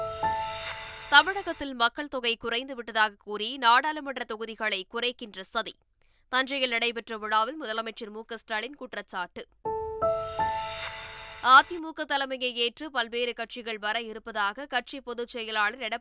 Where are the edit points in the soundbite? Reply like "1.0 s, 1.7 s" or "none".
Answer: 0.9 s